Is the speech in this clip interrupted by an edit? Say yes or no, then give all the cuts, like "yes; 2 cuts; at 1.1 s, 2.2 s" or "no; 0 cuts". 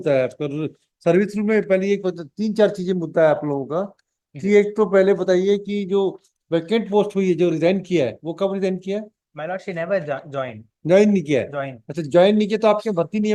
no; 0 cuts